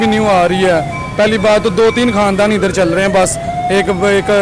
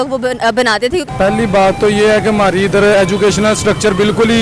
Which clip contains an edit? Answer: second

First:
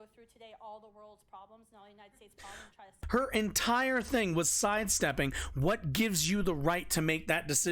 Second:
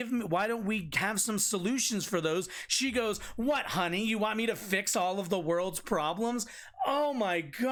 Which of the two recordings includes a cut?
first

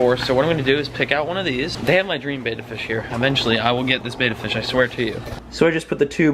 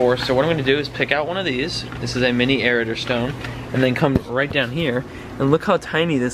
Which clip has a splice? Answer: first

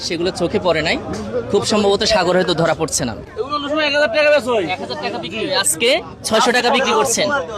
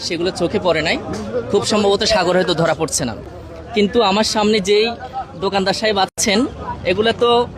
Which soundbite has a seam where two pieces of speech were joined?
first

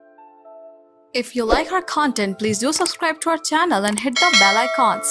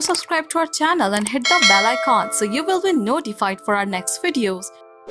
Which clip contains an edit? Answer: first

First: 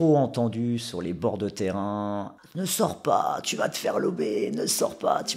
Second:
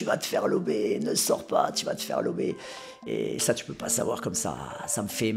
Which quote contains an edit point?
second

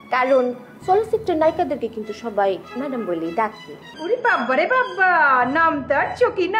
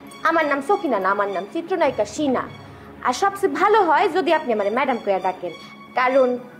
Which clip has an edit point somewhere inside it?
first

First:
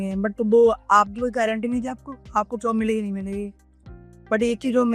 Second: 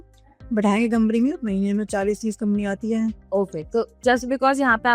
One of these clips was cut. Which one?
second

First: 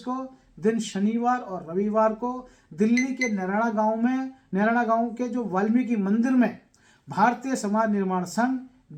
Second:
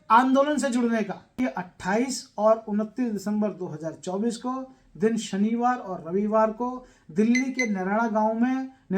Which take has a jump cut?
second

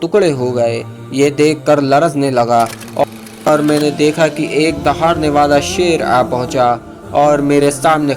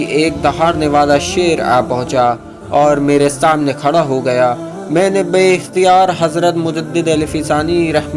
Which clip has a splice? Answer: first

